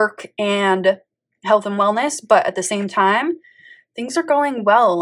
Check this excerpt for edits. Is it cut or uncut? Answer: uncut